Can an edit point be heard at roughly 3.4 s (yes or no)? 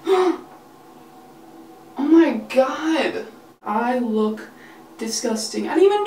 yes